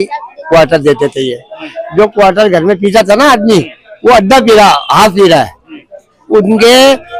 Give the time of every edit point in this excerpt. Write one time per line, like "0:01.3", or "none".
none